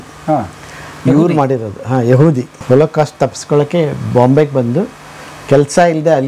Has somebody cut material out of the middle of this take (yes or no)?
yes